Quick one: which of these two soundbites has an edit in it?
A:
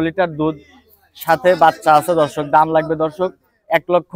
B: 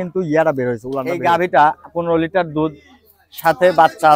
B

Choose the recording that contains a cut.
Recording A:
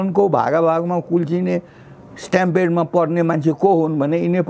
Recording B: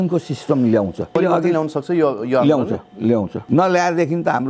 B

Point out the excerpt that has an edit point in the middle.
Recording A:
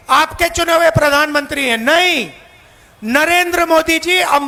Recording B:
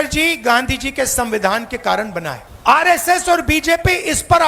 B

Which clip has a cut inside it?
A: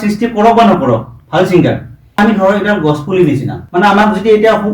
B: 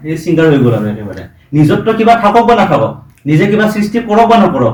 A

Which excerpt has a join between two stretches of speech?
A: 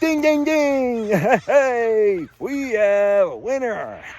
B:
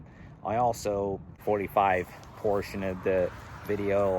B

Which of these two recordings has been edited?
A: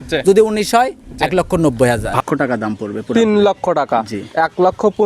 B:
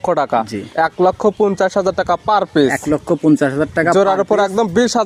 A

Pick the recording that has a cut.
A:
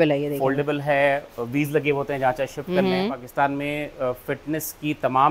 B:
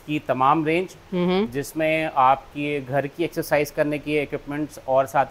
A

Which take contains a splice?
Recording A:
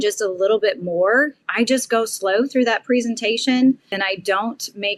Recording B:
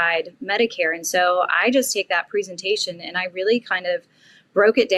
A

